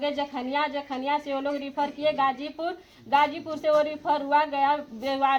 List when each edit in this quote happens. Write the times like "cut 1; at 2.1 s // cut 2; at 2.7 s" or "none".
none